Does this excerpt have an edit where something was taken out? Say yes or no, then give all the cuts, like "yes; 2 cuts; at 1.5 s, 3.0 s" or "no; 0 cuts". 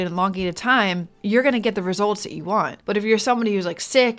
yes; 2 cuts; at 1.1 s, 2.8 s